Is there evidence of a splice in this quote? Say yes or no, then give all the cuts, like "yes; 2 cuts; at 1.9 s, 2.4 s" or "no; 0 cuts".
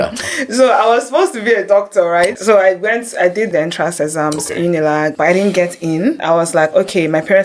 yes; 4 cuts; at 2.4 s, 3.5 s, 5.1 s, 6.2 s